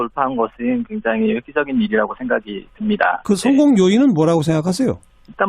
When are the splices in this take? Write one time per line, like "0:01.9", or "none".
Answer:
0:03.2

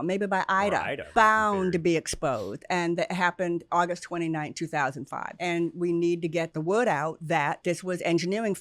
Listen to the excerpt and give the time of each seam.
0:01.0
0:05.2
0:06.5
0:07.6

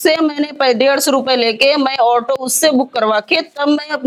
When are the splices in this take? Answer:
none

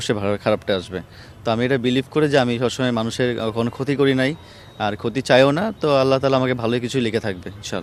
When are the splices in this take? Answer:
none

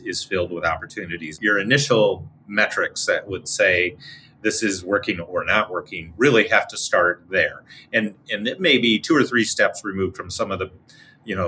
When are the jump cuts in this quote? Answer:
0:01.4

